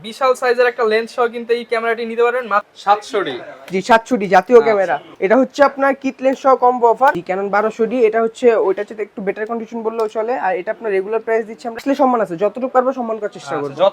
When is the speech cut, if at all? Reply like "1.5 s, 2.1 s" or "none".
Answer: 2.7 s, 7.2 s, 11.8 s